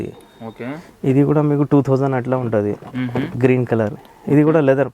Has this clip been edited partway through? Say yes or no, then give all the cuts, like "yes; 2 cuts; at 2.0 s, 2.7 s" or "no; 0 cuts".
yes; 1 cut; at 3.4 s